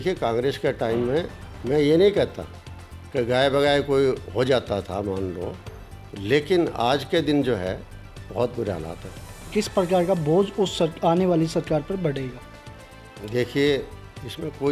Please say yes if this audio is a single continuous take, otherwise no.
no